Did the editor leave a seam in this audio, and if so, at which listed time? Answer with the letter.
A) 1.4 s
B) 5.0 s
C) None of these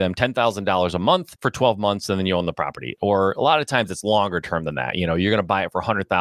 A